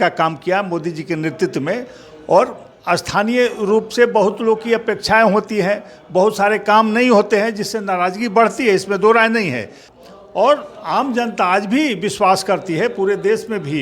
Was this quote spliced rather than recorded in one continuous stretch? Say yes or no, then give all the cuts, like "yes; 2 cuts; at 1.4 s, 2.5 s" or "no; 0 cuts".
yes; 1 cut; at 9.8 s